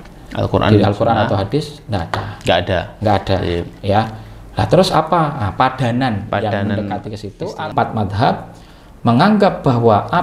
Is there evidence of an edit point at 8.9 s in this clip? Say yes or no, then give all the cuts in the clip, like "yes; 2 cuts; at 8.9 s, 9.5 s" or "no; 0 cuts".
no; 1 cut; at 7.7 s